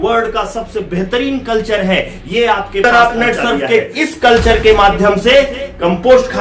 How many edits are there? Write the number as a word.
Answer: one